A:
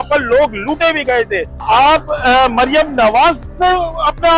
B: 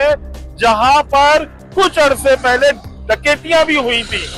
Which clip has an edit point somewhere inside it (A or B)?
A